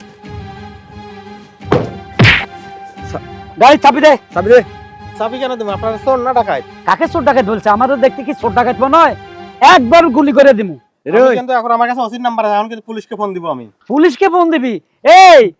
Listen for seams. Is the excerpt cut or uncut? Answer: uncut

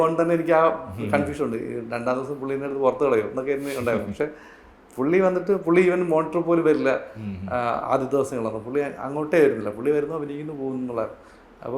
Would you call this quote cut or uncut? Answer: uncut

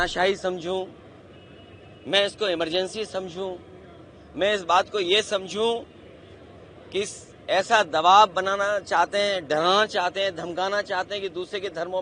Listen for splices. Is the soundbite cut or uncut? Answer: uncut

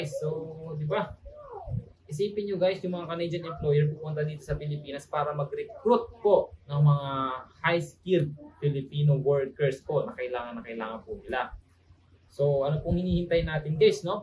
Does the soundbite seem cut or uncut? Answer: uncut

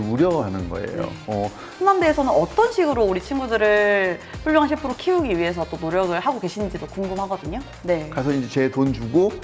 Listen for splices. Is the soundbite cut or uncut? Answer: cut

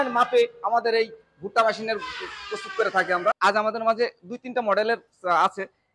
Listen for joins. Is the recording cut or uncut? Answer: cut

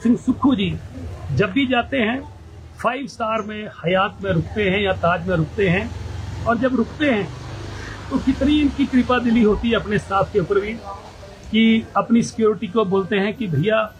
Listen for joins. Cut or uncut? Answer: uncut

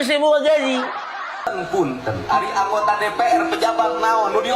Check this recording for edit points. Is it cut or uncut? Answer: cut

